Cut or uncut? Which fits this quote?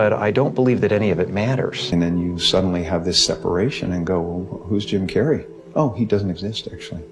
cut